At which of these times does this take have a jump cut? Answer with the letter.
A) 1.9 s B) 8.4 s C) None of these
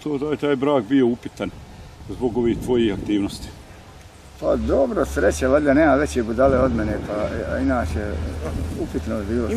C